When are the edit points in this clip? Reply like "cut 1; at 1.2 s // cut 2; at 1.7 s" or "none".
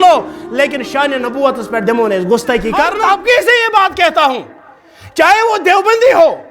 cut 1; at 2.9 s